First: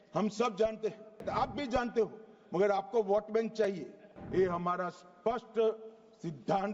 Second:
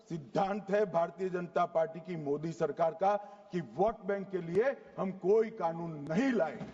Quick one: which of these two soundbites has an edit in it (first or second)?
first